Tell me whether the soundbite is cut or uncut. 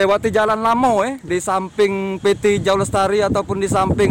cut